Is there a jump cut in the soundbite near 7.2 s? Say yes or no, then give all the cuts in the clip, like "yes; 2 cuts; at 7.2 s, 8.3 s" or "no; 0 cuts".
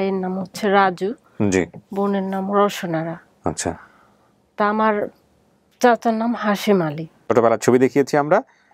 yes; 1 cut; at 7.2 s